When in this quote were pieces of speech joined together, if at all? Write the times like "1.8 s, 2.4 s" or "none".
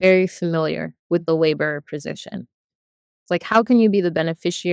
3.0 s